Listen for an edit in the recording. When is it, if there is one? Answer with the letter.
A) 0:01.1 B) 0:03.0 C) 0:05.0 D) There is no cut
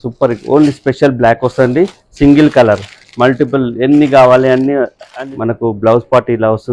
C